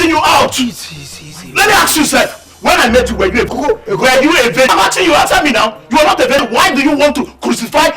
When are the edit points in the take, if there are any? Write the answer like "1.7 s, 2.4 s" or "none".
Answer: 3.5 s, 4.7 s, 6.4 s